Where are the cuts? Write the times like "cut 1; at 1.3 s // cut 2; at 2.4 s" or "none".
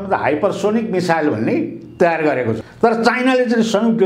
cut 1; at 2.6 s